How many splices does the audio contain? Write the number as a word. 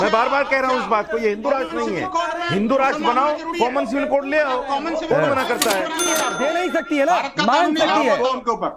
one